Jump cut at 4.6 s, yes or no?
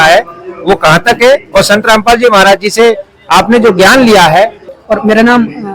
yes